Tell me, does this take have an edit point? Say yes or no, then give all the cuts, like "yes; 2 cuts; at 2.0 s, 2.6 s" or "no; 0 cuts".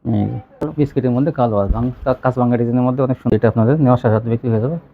yes; 2 cuts; at 0.9 s, 3.3 s